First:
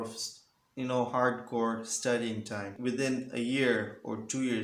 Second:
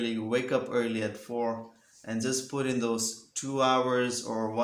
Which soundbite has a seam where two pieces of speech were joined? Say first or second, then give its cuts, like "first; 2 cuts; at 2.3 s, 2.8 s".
first; 1 cut; at 2.7 s